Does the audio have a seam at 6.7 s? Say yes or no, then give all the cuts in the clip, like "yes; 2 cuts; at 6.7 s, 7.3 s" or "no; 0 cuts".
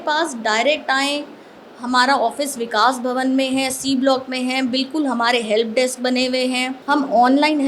yes; 1 cut; at 6.7 s